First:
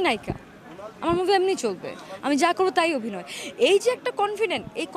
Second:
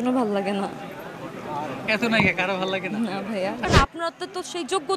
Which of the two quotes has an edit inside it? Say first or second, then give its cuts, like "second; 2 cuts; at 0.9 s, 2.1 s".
second; 1 cut; at 3.6 s